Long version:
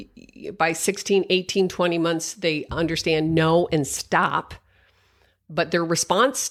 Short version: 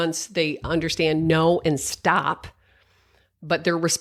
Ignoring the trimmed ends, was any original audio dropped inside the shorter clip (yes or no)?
no